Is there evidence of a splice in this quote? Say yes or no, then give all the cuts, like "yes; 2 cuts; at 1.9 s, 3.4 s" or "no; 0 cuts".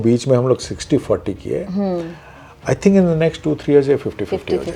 no; 0 cuts